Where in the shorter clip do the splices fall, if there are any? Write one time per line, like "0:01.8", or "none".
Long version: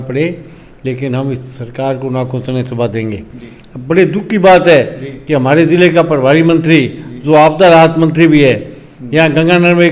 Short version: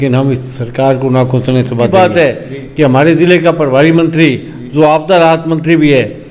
0:01.9